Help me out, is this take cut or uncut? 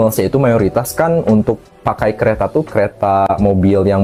uncut